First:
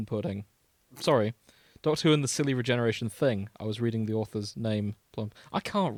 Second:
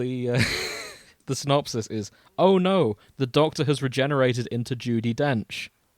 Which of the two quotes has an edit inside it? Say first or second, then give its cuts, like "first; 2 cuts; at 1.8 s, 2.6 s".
second; 1 cut; at 1.2 s